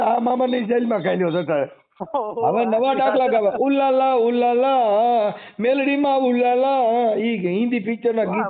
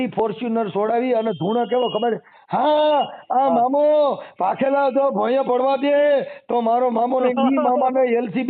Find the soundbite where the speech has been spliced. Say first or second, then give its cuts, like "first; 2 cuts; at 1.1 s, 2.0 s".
first; 1 cut; at 2.0 s